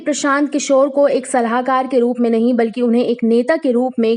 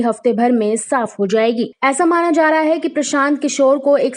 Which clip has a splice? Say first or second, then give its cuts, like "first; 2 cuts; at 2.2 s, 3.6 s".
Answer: second; 1 cut; at 1.7 s